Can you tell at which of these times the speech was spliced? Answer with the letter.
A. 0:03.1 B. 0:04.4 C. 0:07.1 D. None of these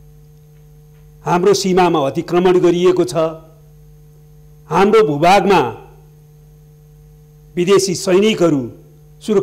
D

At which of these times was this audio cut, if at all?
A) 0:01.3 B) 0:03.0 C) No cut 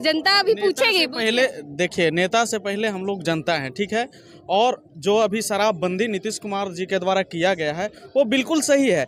C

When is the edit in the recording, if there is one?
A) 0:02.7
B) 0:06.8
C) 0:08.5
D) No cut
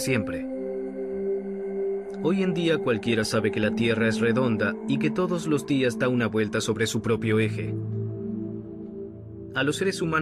A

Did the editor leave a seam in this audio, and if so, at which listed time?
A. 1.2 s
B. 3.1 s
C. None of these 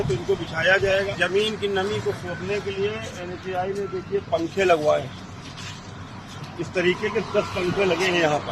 A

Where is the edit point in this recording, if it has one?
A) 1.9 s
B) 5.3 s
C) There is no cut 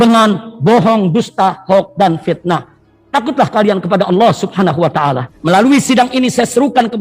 B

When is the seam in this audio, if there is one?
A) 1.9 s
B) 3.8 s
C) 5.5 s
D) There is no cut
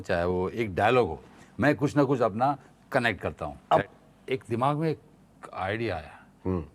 B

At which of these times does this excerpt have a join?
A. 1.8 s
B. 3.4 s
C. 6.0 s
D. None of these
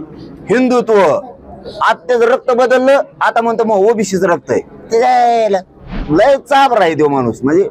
C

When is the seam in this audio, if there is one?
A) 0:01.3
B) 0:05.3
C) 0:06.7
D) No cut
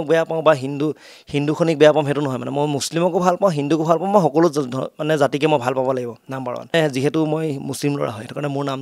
C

